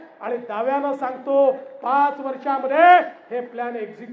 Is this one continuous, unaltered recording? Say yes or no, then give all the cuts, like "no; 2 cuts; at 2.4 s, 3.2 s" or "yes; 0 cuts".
yes; 0 cuts